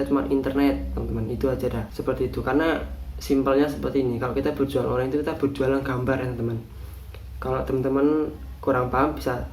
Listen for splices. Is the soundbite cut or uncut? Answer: uncut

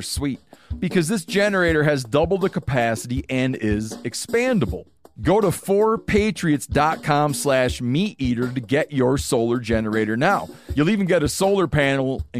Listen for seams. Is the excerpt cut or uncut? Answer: uncut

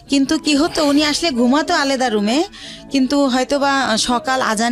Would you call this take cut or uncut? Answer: uncut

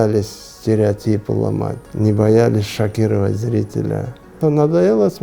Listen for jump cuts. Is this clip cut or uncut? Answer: cut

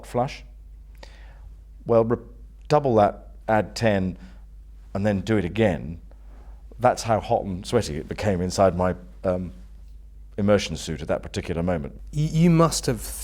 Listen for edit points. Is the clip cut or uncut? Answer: cut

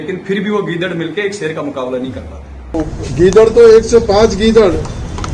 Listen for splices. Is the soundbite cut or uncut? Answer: cut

